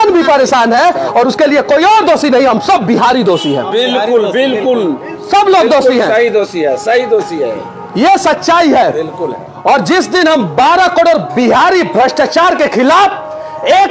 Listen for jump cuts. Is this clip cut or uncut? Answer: uncut